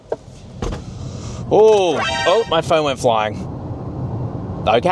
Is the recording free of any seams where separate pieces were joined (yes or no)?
no